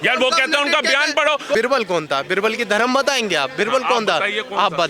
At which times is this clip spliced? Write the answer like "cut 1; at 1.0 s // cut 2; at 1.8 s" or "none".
cut 1; at 1.5 s

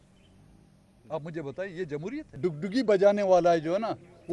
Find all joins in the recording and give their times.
cut 1; at 2.2 s

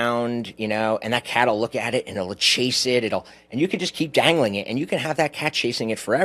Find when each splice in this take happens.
none

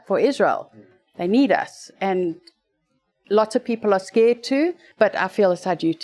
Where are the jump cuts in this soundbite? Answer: cut 1; at 4.8 s

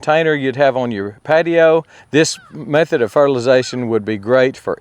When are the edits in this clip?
cut 1; at 2.0 s

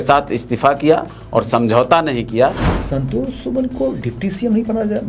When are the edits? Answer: cut 1; at 2.7 s

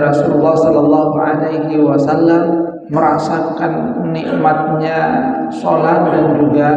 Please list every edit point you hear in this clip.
cut 1; at 2.8 s

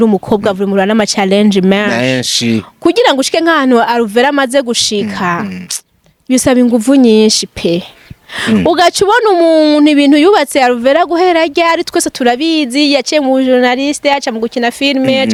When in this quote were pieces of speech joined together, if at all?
none

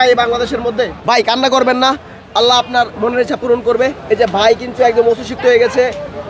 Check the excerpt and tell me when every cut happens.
cut 1; at 1.0 s

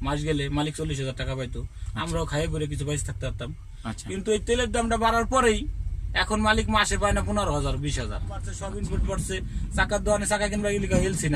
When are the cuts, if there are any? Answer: cut 1; at 8.5 s

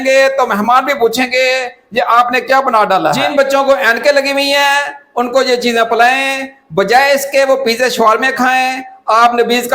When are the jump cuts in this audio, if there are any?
cut 1; at 3.2 s

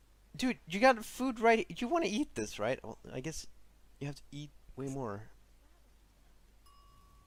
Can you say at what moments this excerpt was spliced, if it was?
none

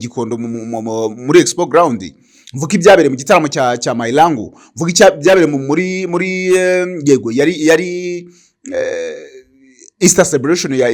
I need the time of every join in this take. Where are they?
none

